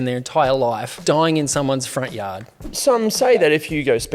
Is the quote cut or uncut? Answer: cut